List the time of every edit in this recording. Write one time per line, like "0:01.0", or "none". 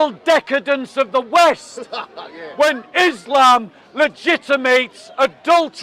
none